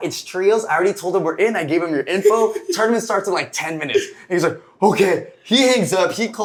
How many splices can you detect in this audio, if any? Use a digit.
0